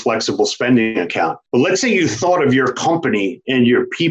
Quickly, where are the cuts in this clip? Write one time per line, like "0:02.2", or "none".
0:01.4